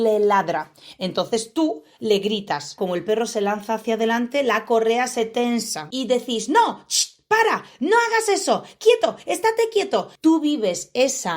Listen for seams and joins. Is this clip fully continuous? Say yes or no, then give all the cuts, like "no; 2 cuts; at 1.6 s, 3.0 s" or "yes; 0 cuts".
no; 3 cuts; at 2.7 s, 5.9 s, 10.1 s